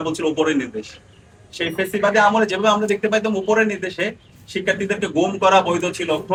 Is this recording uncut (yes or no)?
yes